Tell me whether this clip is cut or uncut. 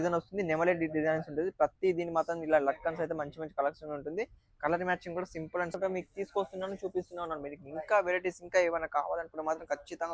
cut